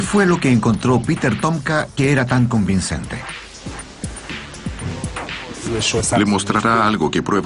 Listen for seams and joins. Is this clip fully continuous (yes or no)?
no